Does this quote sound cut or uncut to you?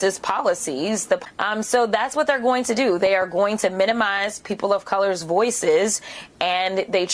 cut